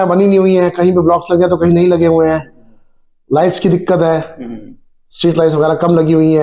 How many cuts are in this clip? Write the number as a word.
zero